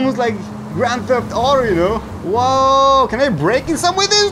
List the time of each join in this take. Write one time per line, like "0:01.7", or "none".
0:02.1